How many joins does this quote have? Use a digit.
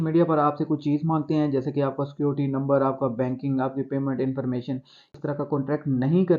0